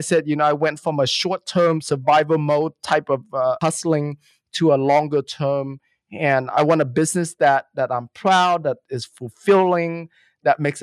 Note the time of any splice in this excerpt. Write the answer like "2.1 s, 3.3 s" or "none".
3.6 s, 6.5 s

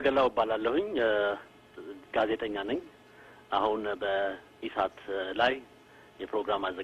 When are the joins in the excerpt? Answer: none

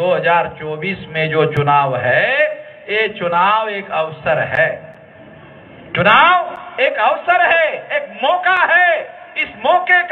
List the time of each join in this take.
none

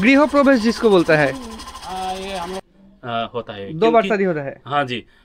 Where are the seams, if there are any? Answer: 2.6 s

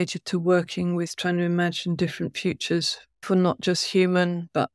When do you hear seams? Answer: 3.2 s

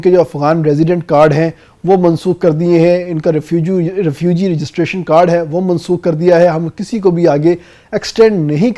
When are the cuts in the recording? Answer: none

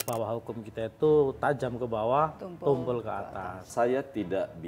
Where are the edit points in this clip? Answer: 1.4 s, 3.7 s

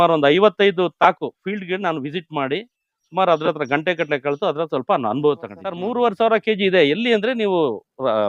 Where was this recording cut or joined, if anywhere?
5.8 s

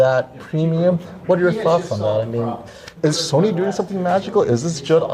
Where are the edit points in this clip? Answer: 2.9 s

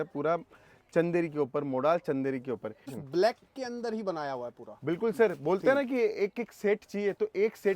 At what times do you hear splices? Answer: 3.0 s

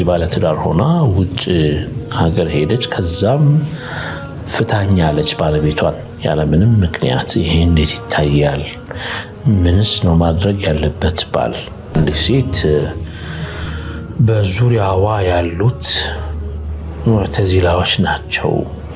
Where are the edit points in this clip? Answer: 11.9 s

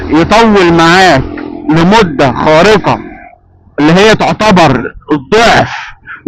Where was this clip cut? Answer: none

